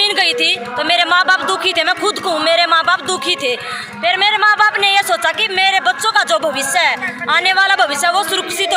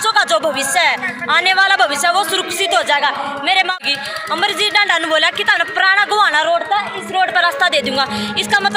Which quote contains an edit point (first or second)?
second